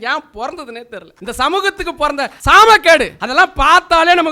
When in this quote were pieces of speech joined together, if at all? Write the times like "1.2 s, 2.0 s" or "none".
1.0 s, 2.3 s, 3.2 s